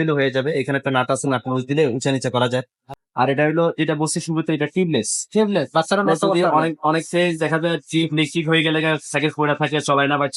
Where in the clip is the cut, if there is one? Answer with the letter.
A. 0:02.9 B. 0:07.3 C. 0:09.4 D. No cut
A